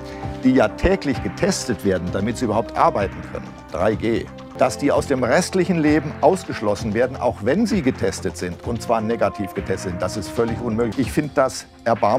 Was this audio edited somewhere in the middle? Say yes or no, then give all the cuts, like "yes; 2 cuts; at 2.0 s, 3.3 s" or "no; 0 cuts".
yes; 2 cuts; at 4.4 s, 10.9 s